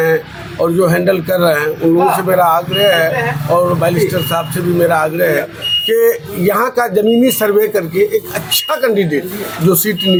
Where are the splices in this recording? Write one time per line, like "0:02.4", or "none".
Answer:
none